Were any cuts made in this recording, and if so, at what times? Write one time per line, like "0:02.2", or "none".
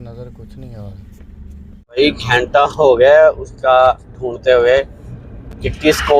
0:02.0